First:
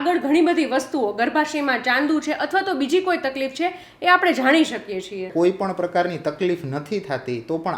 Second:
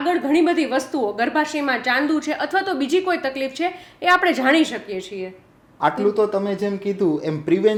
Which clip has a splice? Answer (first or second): first